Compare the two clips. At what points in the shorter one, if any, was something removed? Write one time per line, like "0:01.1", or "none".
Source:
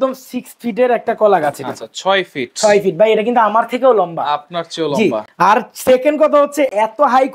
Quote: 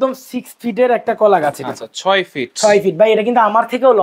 none